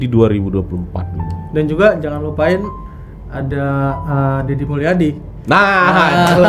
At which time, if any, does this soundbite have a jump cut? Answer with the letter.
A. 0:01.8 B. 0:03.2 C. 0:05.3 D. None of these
D